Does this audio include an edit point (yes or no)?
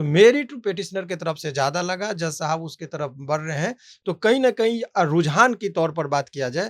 no